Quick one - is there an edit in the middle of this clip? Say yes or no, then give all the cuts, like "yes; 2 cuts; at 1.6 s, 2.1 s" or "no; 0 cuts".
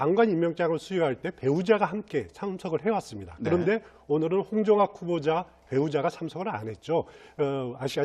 yes; 1 cut; at 1.6 s